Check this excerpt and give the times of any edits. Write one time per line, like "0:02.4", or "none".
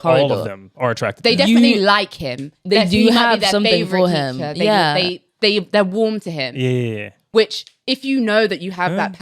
none